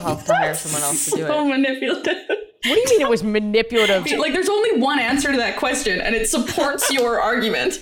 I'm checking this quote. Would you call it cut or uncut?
cut